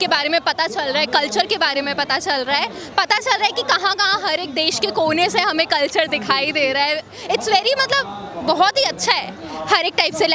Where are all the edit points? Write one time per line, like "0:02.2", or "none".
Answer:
none